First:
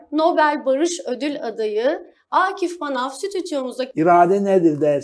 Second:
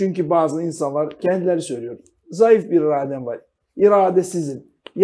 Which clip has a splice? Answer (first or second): first